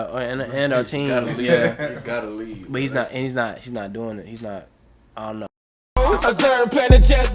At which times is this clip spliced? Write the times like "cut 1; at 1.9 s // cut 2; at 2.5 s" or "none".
cut 1; at 6.0 s